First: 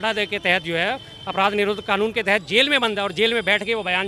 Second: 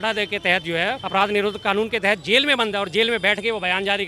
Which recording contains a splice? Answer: second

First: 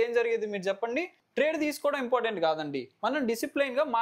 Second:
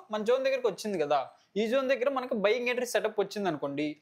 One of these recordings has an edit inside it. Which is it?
first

